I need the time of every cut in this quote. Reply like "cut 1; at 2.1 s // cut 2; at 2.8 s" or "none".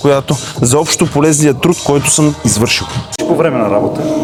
none